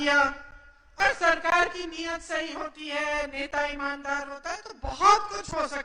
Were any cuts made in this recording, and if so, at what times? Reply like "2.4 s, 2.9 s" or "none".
1.0 s